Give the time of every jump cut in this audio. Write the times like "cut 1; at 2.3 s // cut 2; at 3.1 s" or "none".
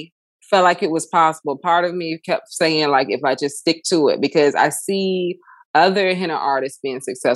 none